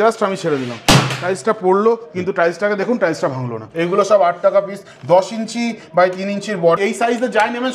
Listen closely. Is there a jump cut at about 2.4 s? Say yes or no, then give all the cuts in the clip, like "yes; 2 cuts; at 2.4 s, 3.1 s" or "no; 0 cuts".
no; 2 cuts; at 3.6 s, 6.8 s